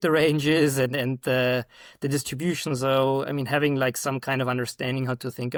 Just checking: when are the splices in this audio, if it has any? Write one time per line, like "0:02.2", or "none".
none